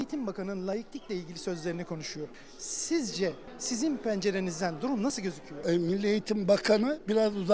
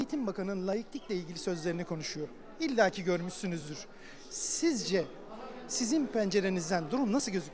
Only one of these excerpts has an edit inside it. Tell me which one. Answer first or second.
first